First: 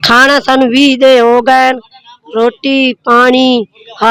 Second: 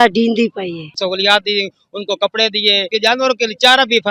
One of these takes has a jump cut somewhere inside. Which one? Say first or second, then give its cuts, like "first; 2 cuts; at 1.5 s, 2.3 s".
second; 2 cuts; at 1.0 s, 2.9 s